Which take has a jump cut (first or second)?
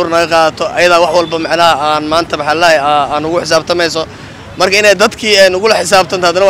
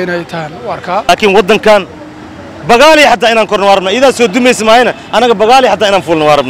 second